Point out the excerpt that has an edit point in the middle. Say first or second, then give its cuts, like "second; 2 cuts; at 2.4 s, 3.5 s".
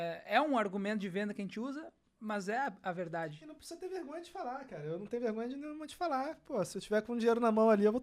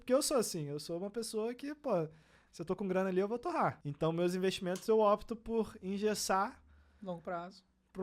second; 1 cut; at 3.8 s